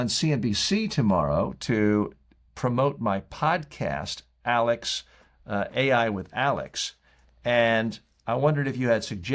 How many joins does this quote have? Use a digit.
0